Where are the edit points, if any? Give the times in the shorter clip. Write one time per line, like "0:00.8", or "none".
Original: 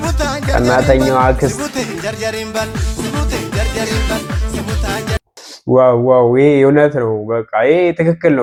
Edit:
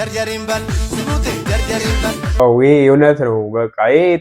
0:02.4